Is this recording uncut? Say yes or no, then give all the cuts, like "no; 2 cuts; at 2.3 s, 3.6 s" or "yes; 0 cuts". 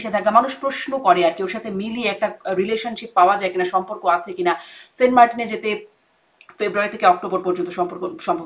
yes; 0 cuts